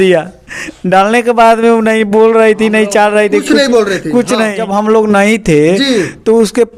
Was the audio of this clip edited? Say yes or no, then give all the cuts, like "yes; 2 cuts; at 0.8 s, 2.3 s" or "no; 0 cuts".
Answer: yes; 1 cut; at 4.6 s